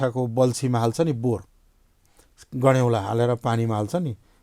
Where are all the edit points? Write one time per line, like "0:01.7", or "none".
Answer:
none